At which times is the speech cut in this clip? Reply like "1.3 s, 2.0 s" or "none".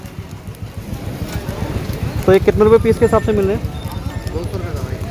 none